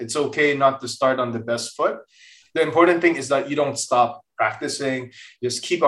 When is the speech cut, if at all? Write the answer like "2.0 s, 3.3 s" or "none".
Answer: none